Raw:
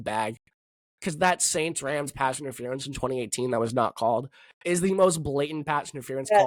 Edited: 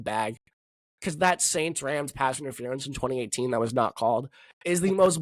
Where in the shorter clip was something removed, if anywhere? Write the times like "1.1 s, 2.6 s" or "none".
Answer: none

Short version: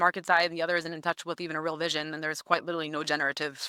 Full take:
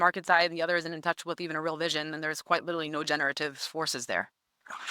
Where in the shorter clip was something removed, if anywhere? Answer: none

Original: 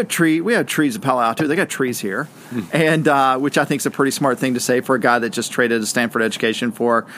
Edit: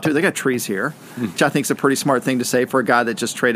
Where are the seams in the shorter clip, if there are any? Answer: 1.4 s

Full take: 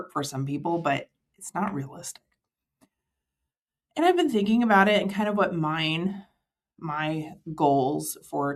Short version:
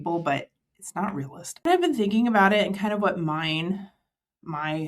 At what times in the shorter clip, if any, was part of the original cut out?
1.7 s

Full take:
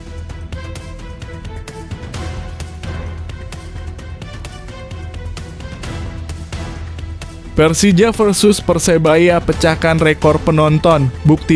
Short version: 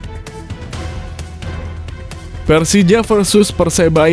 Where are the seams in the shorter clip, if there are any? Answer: 2.4 s

